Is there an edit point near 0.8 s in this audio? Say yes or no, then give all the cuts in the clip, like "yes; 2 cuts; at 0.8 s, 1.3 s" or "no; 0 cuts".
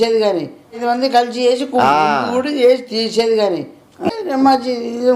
yes; 2 cuts; at 0.8 s, 4.0 s